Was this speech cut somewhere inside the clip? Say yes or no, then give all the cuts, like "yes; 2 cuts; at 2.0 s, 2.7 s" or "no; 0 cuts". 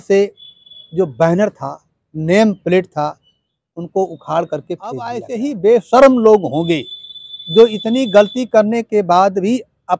yes; 1 cut; at 5.3 s